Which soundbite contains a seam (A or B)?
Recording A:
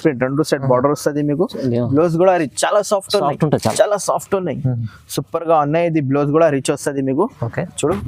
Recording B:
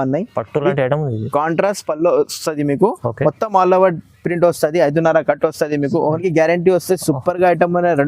B